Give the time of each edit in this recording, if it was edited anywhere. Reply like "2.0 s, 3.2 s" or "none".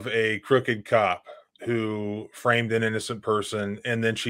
none